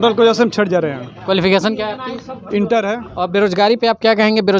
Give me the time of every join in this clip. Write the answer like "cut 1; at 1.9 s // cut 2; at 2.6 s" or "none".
cut 1; at 3.1 s